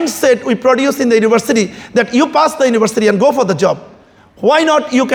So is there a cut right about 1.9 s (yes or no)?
no